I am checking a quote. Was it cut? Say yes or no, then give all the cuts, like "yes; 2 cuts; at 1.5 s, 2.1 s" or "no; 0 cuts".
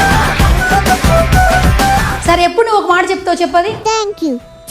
no; 0 cuts